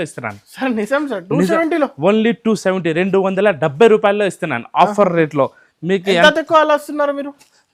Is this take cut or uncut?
uncut